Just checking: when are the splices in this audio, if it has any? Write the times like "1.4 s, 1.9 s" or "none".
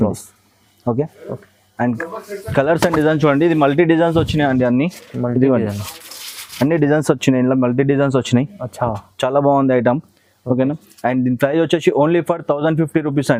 none